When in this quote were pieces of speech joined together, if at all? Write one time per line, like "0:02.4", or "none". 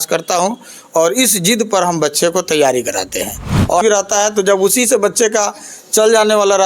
0:03.8